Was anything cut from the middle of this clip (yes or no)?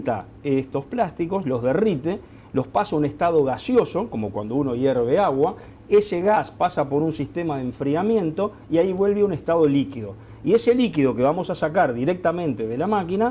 yes